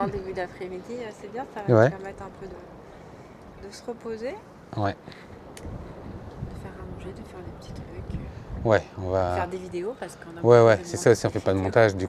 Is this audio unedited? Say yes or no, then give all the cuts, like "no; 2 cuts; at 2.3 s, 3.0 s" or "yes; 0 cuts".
yes; 0 cuts